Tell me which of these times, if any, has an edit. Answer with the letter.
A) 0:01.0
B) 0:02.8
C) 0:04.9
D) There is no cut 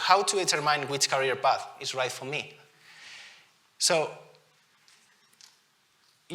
D